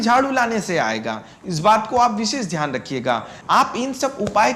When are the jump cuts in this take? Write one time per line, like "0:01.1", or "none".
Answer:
0:03.4